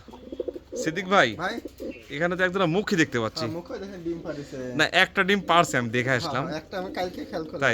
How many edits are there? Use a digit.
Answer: 0